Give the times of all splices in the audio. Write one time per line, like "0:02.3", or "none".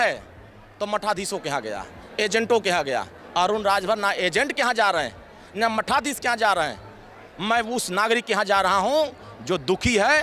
none